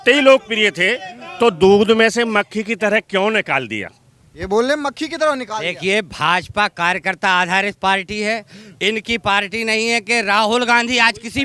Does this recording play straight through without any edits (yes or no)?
yes